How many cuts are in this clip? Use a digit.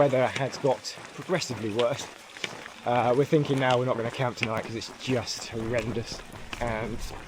0